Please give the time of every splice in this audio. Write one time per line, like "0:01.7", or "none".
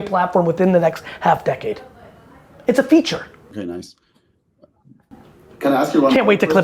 none